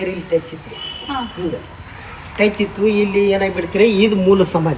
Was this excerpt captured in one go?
yes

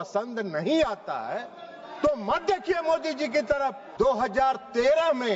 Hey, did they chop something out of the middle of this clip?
yes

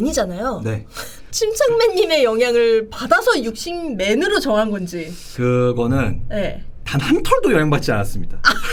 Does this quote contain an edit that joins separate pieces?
no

